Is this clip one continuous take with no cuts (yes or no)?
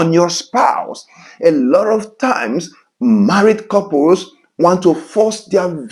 yes